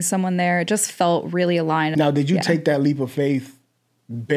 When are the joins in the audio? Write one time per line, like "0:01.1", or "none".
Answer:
0:01.9